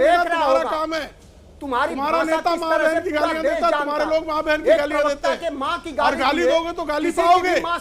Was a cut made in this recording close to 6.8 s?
no; 0 cuts

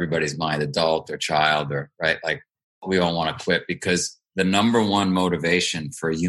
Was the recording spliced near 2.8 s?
yes; 1 cut; at 2.8 s

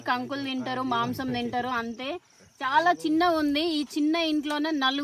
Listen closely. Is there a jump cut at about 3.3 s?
no; 0 cuts

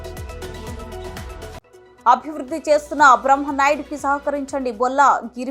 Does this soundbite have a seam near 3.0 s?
no; 1 cut; at 1.2 s

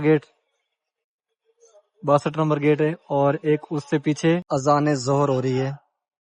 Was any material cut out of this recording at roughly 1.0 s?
no; 1 cut; at 4.4 s

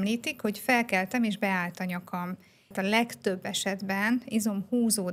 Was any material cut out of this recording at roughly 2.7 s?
yes; 1 cut; at 2.7 s

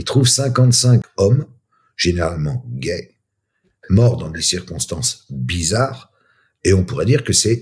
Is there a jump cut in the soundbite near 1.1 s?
yes; 1 cut; at 1.1 s

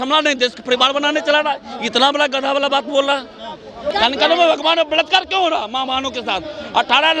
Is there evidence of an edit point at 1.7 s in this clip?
no; 1 cut; at 3.9 s

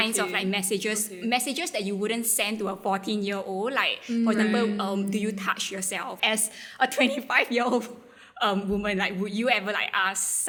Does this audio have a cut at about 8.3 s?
no; 0 cuts

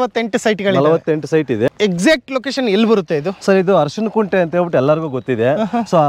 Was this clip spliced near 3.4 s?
no; 1 cut; at 1.7 s

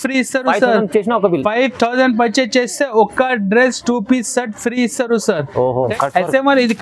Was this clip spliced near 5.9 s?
yes; 1 cut; at 5.9 s

